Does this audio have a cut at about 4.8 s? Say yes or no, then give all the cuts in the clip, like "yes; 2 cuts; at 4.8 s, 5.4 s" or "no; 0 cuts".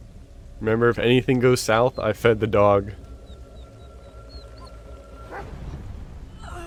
no; 0 cuts